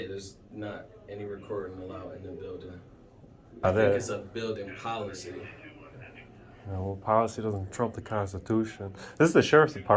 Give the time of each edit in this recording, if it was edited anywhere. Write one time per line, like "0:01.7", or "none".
0:03.6